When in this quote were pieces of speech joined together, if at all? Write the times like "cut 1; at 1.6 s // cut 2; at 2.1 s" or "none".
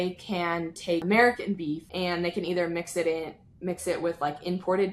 cut 1; at 1.0 s // cut 2; at 1.9 s